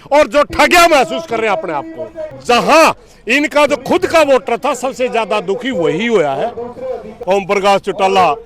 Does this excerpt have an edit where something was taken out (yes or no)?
yes